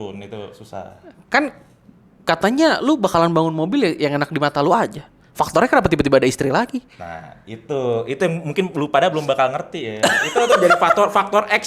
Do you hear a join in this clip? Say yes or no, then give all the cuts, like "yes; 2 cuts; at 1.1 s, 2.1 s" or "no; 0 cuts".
no; 0 cuts